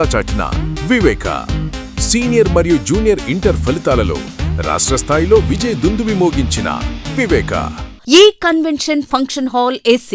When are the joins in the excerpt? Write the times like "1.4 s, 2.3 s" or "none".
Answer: 7.9 s